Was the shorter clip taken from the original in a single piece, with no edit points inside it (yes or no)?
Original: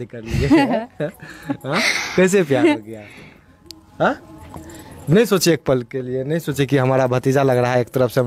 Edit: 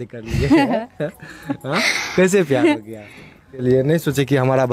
no